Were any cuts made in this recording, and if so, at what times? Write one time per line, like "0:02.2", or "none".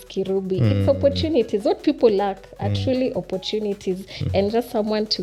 none